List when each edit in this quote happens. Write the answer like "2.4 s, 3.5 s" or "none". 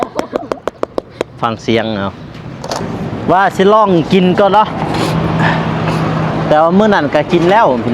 2.8 s